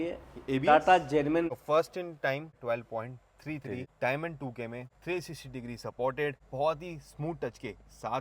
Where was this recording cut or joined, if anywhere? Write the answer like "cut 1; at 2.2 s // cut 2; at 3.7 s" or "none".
cut 1; at 1.5 s // cut 2; at 2.6 s // cut 3; at 3.9 s // cut 4; at 4.9 s // cut 5; at 6.4 s

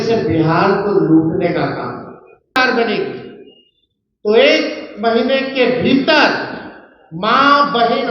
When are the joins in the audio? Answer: cut 1; at 2.6 s

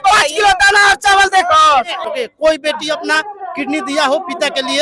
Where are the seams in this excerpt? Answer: cut 1; at 2.0 s

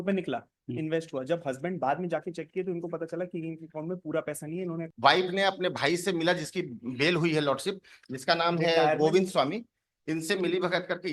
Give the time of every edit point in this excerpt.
cut 1; at 4.9 s

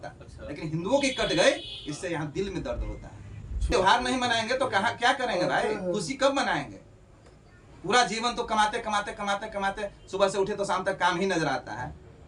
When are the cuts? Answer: cut 1; at 3.7 s

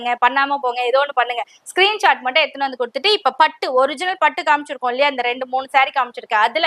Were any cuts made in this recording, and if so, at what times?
none

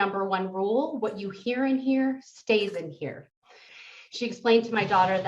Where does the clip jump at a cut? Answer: cut 1; at 3.5 s

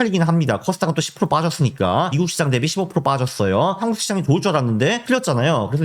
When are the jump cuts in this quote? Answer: cut 1; at 2.1 s // cut 2; at 3.8 s // cut 3; at 5.0 s

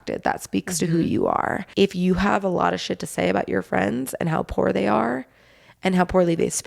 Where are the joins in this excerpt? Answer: cut 1; at 1.6 s

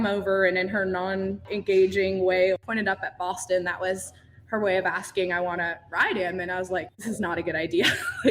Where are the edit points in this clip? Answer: cut 1; at 1.5 s // cut 2; at 2.6 s // cut 3; at 6.9 s

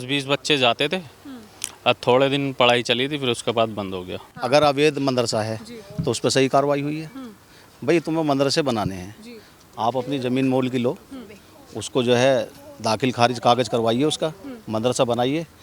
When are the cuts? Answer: cut 1; at 4.2 s

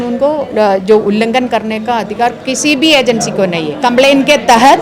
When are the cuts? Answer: cut 1; at 3.9 s

